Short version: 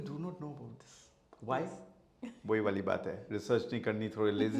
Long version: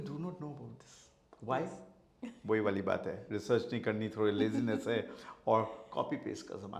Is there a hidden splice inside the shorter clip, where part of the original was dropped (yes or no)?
no